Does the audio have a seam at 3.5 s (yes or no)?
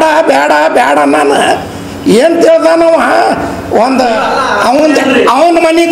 no